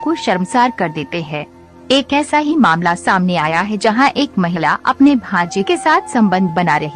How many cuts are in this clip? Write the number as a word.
one